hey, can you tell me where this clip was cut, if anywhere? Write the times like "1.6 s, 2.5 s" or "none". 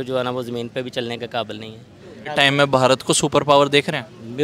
2.3 s